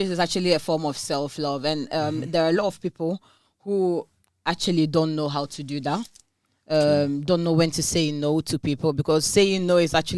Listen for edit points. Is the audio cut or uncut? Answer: uncut